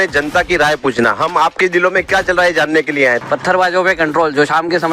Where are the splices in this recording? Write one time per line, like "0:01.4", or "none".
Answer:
0:03.2